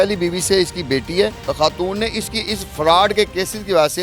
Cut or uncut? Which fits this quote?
cut